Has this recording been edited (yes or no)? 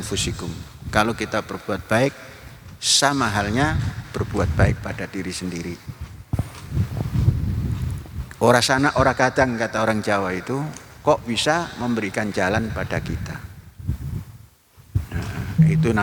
no